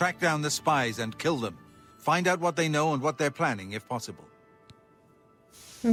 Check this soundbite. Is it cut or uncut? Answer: uncut